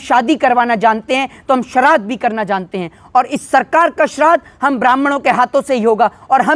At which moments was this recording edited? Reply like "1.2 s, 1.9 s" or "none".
none